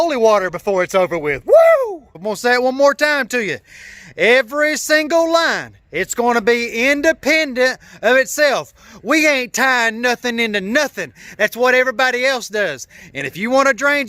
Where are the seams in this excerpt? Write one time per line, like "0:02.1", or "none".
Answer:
0:02.2